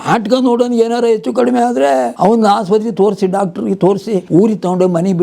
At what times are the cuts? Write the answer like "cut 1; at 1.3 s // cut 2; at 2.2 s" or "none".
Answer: cut 1; at 2.1 s // cut 2; at 4.2 s